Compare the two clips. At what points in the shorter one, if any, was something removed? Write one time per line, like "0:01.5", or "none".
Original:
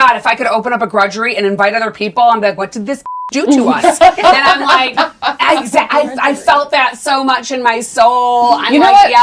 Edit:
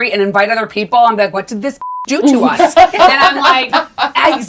none